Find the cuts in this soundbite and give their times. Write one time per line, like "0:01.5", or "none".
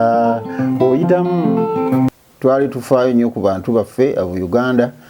0:02.1